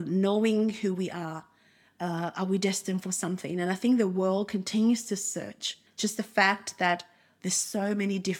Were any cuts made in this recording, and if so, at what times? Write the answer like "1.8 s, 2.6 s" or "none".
5.8 s